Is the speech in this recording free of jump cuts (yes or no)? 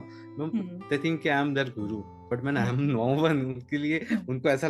yes